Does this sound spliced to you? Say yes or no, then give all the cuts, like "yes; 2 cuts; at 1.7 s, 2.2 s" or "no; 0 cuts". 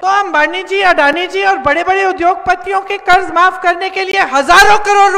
no; 0 cuts